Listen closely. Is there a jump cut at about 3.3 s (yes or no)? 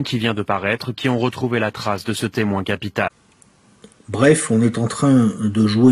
yes